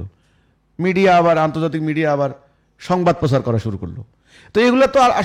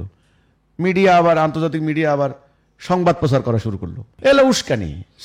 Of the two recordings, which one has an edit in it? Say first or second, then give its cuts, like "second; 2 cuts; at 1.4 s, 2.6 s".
second; 1 cut; at 4.1 s